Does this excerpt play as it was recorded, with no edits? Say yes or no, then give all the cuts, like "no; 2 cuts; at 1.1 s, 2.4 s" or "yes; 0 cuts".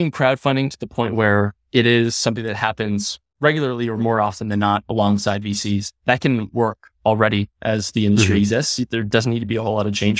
yes; 0 cuts